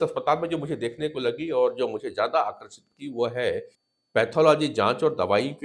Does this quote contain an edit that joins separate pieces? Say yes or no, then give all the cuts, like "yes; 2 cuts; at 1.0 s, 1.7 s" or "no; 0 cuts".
no; 0 cuts